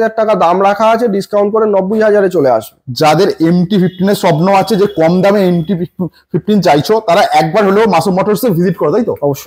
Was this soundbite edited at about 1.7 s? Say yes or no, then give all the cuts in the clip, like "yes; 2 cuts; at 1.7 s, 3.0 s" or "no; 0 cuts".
no; 0 cuts